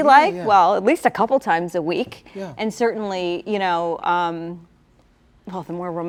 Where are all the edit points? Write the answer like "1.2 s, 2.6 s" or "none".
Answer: none